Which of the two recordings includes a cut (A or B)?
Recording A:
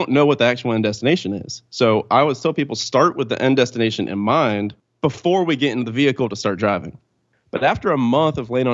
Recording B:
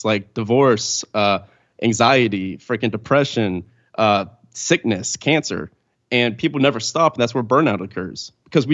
A